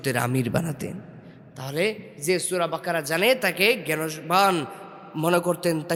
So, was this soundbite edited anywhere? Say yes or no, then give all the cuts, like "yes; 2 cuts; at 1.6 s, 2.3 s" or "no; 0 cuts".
no; 0 cuts